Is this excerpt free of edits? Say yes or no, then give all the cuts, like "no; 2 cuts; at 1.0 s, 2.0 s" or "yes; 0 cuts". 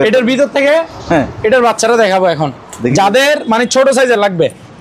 yes; 0 cuts